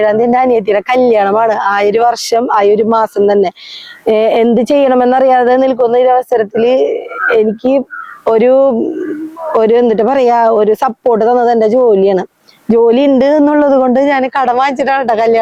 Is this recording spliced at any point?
no; 0 cuts

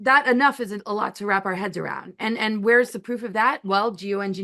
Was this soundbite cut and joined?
no; 0 cuts

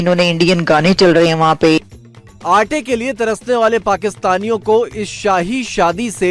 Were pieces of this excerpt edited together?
no; 0 cuts

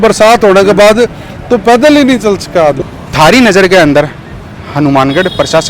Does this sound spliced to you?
yes; 1 cut; at 2.8 s

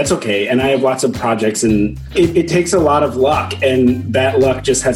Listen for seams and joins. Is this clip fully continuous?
no; 1 cut; at 2.1 s

